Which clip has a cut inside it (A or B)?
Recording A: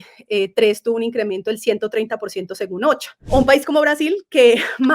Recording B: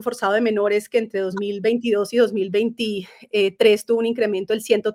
A